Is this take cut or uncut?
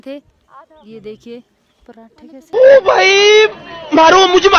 uncut